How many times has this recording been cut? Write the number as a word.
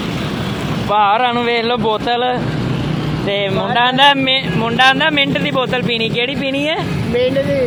zero